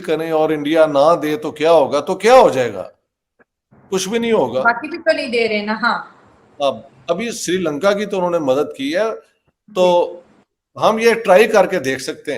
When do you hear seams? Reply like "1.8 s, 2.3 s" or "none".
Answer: none